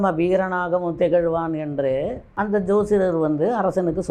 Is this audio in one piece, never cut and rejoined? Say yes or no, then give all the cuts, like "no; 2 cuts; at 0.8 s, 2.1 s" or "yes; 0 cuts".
yes; 0 cuts